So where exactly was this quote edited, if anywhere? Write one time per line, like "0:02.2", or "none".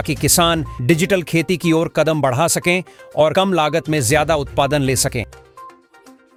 none